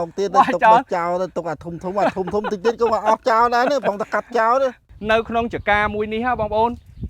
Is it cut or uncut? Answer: cut